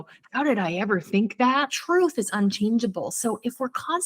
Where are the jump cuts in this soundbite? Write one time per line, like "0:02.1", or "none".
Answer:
0:01.8